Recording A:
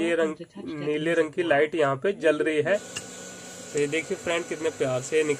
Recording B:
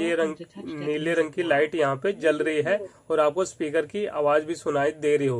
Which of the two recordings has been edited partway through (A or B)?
A